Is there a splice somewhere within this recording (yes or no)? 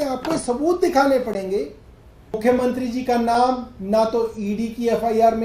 yes